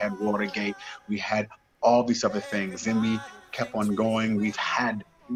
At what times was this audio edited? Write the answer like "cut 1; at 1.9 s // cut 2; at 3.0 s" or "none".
none

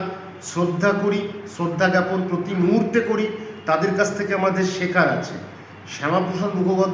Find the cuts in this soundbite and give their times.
none

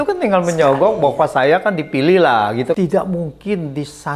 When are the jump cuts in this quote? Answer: cut 1; at 2.8 s

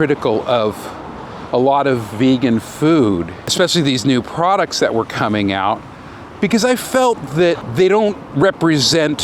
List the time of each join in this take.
cut 1; at 3.5 s // cut 2; at 7.7 s

